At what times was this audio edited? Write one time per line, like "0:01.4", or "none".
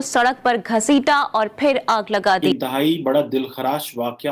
0:02.4